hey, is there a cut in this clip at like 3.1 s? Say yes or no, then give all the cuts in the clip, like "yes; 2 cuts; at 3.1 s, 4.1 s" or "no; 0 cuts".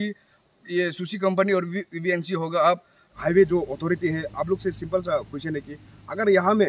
yes; 1 cut; at 3.1 s